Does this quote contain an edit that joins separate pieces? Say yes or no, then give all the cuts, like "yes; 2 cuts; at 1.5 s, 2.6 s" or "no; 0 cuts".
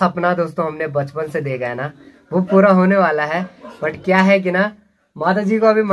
no; 0 cuts